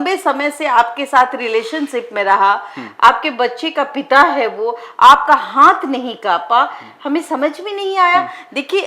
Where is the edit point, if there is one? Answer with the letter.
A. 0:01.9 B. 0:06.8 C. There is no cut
C